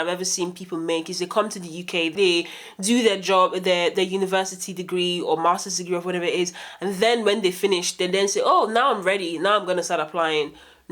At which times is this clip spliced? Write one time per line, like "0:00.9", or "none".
0:02.1